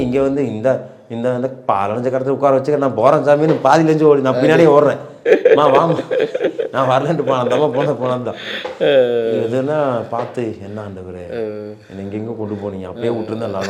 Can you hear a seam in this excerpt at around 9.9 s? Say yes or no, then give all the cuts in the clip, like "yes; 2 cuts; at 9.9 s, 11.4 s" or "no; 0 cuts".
no; 0 cuts